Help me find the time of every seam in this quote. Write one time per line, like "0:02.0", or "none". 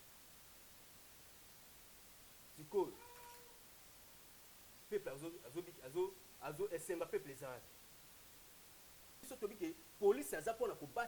0:09.3